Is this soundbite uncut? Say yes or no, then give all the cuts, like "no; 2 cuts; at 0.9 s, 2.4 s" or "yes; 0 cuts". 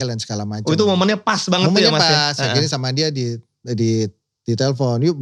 yes; 0 cuts